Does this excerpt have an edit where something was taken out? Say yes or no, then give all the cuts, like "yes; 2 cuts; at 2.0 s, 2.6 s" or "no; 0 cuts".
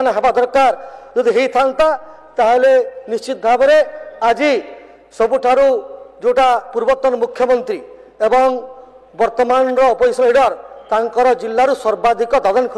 no; 0 cuts